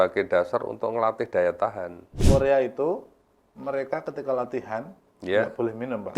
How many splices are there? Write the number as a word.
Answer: one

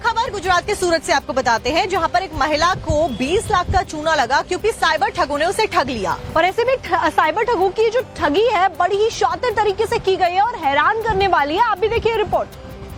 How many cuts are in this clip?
zero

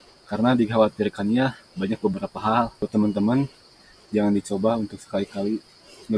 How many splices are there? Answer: one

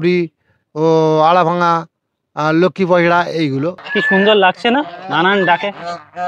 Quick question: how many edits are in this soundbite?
one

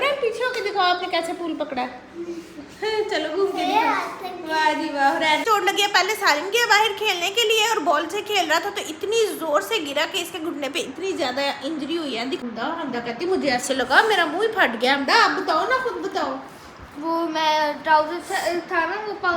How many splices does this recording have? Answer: two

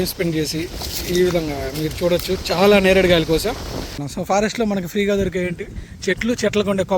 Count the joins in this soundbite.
one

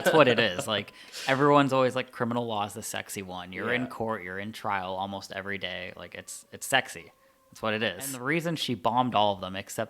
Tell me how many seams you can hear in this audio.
one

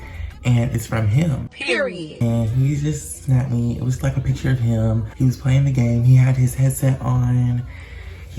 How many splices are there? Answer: zero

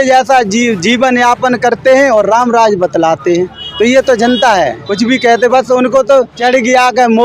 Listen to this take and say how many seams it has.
three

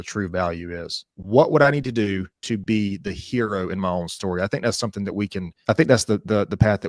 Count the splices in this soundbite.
one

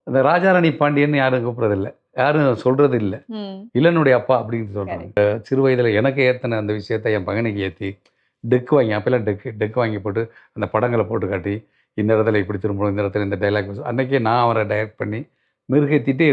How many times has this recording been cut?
one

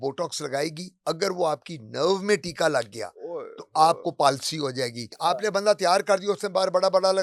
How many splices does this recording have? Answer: one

